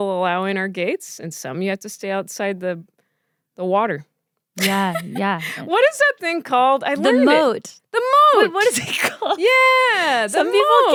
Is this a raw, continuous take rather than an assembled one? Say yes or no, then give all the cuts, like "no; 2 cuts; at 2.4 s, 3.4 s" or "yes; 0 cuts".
yes; 0 cuts